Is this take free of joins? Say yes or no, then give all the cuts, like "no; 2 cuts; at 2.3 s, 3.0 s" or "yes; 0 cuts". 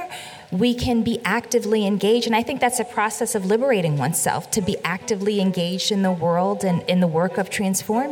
no; 1 cut; at 6.8 s